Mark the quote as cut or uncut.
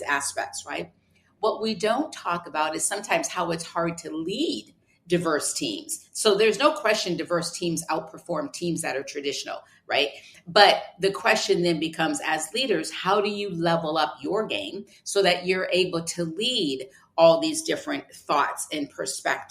uncut